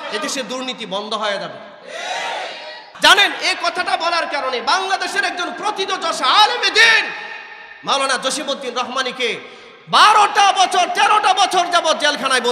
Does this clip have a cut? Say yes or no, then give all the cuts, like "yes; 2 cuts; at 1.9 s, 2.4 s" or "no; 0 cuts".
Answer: yes; 1 cut; at 2.9 s